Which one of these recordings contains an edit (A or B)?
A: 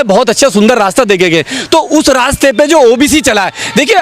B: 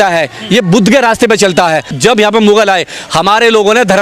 B